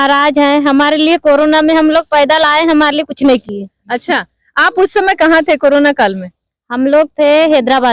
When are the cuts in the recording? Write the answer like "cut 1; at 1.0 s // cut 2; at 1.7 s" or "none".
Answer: none